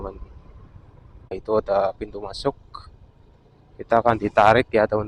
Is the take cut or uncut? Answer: cut